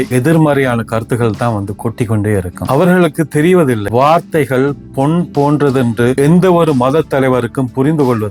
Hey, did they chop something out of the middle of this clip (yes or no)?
no